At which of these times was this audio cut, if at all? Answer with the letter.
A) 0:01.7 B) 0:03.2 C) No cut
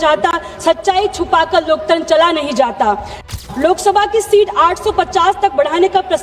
B